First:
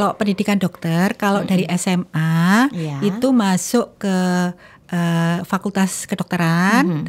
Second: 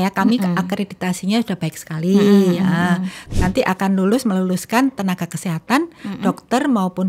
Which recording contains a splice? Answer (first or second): second